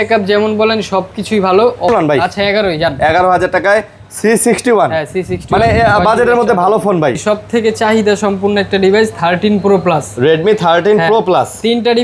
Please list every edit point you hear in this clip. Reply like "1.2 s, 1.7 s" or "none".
1.9 s, 7.2 s